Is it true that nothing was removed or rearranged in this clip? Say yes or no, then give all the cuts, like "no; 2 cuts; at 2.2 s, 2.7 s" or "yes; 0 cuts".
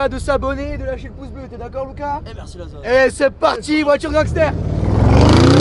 yes; 0 cuts